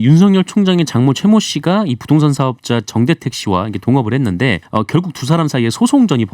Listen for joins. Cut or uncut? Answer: cut